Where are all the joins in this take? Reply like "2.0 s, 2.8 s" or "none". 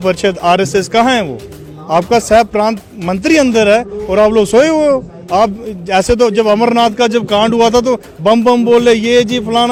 none